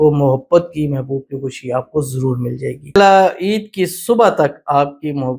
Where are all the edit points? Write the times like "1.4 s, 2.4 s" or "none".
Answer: 3.0 s